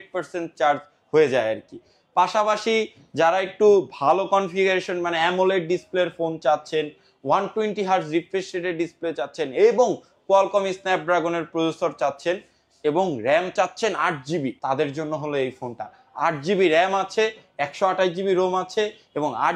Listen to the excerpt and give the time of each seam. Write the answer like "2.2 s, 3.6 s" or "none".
none